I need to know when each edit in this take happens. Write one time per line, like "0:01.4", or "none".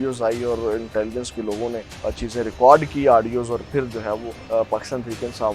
0:01.9
0:04.3